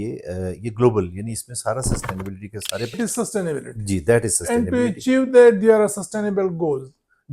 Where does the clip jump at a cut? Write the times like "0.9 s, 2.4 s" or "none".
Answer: 2.9 s